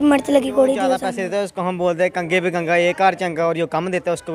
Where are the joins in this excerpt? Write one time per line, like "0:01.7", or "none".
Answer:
0:01.0